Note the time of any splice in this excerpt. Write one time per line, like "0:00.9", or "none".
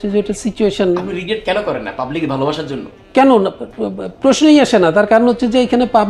none